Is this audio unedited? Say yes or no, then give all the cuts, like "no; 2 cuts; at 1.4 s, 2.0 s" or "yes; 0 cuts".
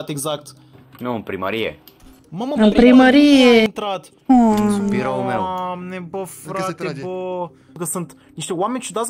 no; 1 cut; at 7.7 s